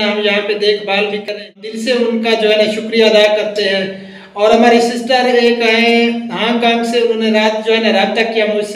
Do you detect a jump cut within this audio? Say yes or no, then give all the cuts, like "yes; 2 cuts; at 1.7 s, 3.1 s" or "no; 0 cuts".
yes; 1 cut; at 1.2 s